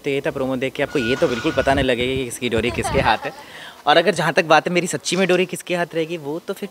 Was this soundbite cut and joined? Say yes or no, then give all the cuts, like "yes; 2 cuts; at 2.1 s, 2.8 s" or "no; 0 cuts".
no; 0 cuts